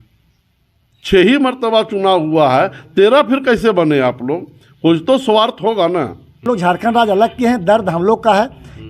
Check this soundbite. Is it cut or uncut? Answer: cut